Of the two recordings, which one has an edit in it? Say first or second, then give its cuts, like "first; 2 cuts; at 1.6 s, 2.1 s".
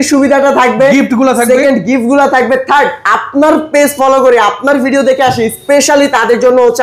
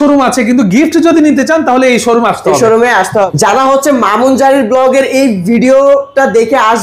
second; 1 cut; at 3.3 s